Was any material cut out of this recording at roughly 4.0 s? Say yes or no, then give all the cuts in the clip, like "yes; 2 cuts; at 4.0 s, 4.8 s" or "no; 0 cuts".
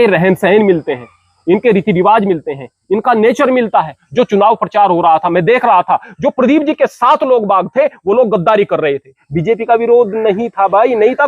yes; 2 cuts; at 4.0 s, 9.3 s